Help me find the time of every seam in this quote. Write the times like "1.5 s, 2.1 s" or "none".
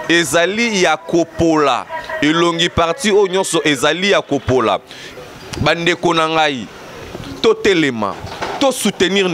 5.0 s